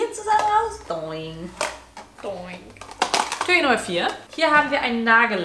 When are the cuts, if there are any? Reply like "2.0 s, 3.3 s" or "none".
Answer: none